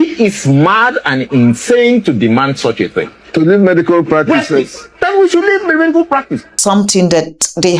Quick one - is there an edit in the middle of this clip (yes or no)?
yes